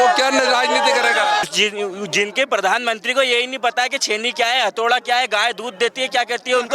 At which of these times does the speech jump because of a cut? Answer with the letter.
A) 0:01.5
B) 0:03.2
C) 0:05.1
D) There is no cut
A